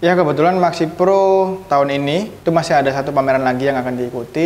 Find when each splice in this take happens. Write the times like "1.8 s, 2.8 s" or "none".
2.0 s